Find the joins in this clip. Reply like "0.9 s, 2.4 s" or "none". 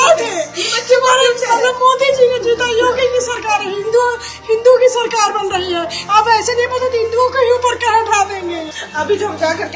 8.6 s